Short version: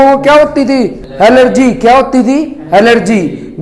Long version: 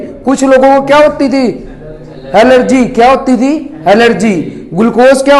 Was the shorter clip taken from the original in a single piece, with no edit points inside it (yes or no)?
no